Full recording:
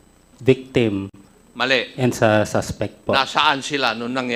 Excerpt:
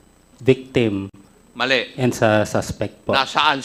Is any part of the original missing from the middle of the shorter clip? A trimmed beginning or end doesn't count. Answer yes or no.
no